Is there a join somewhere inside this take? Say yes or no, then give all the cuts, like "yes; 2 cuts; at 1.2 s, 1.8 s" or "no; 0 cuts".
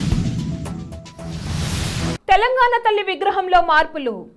yes; 1 cut; at 2.2 s